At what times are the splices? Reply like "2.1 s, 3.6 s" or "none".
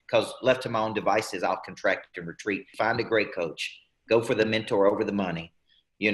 2.7 s